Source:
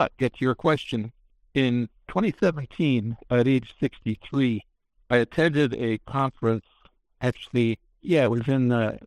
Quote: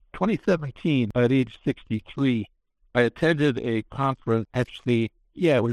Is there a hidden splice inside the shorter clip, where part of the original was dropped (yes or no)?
yes